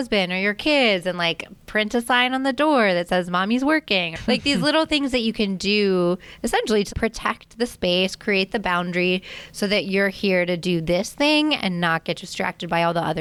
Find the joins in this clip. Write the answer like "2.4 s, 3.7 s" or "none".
4.1 s, 6.9 s